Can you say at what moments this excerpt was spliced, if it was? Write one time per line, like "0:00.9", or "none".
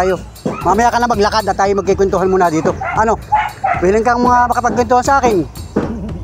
none